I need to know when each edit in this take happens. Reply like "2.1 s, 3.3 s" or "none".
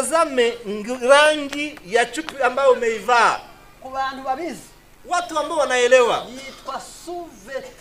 none